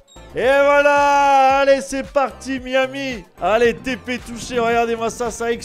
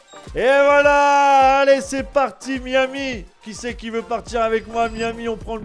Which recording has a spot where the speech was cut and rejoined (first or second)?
first